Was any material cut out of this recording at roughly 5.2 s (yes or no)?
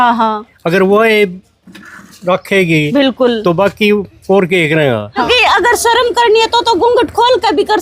yes